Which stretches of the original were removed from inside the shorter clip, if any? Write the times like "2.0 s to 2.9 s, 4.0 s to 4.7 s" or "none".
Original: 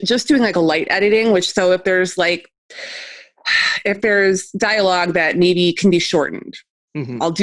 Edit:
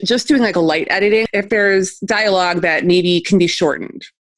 1.2 s to 3.8 s